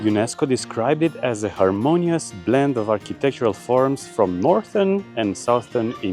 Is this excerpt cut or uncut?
uncut